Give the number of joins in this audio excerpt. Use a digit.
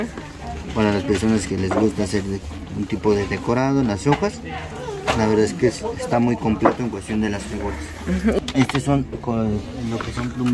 1